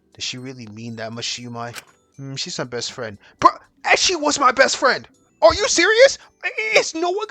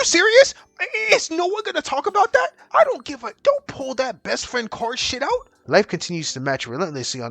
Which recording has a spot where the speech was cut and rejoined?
second; 2 cuts; at 2.6 s, 5.5 s

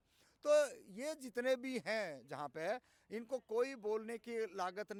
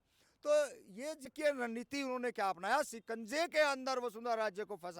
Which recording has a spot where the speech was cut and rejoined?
second; 1 cut; at 1.3 s

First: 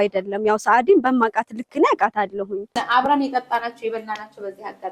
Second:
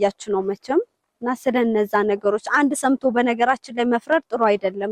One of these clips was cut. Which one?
first; 1 cut; at 2.8 s

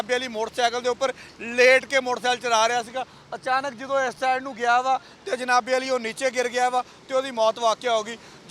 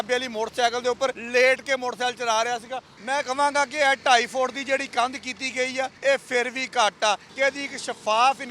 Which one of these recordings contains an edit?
second; 4 cuts; at 1.2 s, 3.0 s, 5.9 s, 7.3 s

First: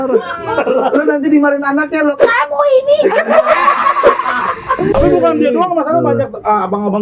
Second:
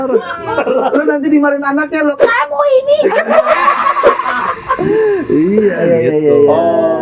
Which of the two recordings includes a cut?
first; 1 cut; at 4.9 s

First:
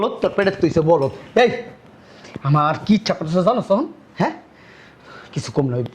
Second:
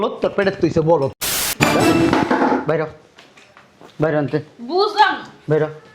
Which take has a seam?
second; 1 cut; at 1.2 s

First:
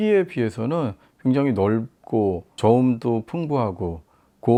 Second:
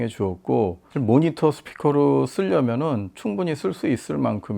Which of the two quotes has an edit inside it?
second; 1 cut; at 0.9 s

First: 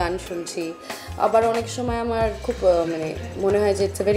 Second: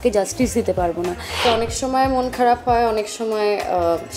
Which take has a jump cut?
second; 1 cut; at 1.3 s

